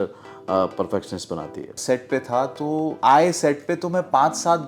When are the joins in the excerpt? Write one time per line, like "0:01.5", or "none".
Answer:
0:01.8
0:03.0